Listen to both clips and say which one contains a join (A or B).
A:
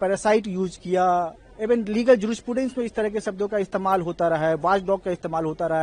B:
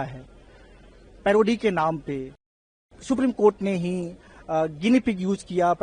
B